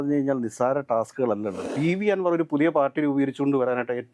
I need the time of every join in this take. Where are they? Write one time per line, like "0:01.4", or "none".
0:01.6

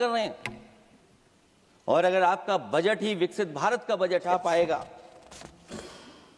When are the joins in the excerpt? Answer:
0:04.2

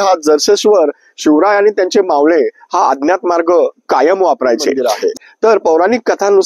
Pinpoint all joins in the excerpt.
0:04.9

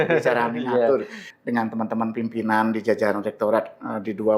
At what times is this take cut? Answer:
0:01.2

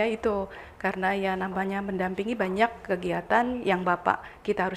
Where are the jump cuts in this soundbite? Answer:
none

